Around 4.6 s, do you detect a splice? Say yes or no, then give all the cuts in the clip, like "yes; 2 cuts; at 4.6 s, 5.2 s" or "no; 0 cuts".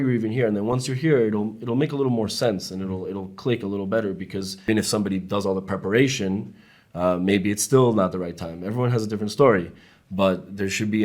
yes; 1 cut; at 4.6 s